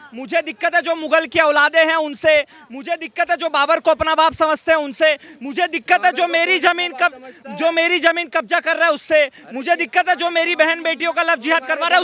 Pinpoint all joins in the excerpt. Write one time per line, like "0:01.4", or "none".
none